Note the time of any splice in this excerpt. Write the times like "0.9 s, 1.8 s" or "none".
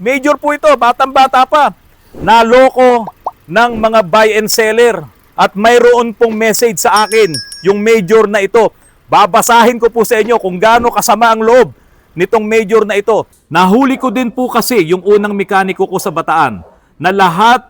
5.1 s, 13.4 s